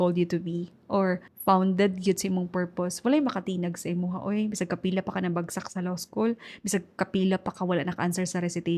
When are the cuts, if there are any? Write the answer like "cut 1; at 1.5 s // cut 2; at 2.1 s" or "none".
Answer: cut 1; at 1.3 s